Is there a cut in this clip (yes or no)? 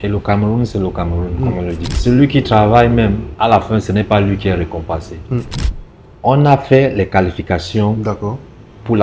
yes